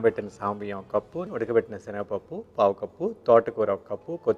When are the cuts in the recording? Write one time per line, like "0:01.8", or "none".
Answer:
0:01.2